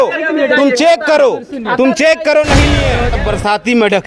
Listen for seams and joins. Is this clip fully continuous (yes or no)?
no